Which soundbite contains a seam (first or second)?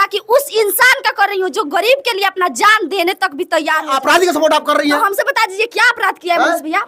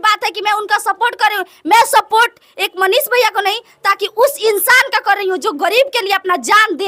first